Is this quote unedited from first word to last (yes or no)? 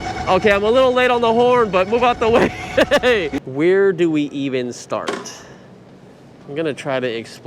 no